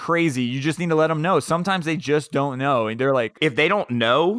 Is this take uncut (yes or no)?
no